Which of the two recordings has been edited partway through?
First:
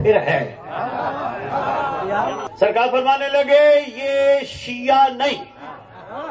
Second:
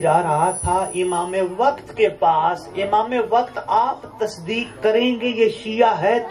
first; 1 cut; at 2.5 s

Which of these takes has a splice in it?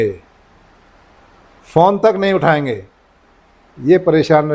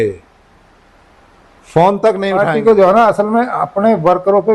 second; 1 cut; at 2.4 s

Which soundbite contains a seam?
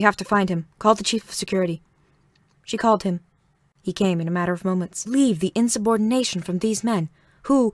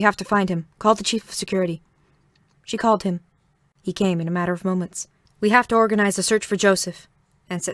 second; 1 cut; at 5.0 s

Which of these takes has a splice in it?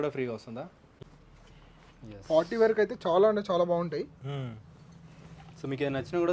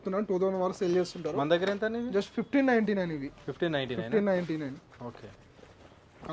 first; 1 cut; at 0.9 s

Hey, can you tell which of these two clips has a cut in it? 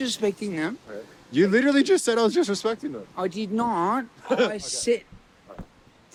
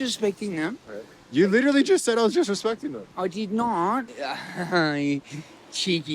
second; 1 cut; at 4.1 s

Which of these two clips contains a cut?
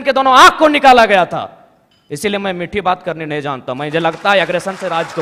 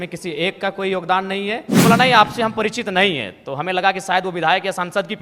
second; 1 cut; at 1.7 s

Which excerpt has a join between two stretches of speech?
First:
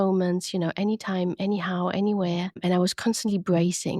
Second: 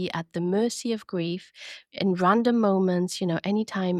first; 1 cut; at 2.6 s

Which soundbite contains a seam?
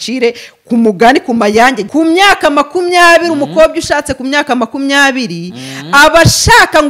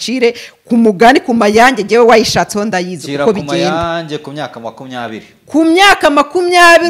first; 1 cut; at 1.8 s

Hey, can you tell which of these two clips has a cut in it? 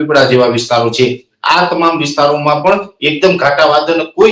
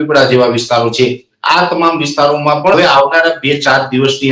second; 1 cut; at 2.8 s

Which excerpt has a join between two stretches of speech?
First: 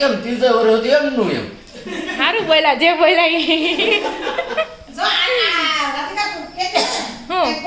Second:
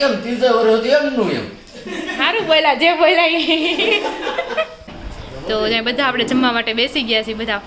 second; 1 cut; at 4.9 s

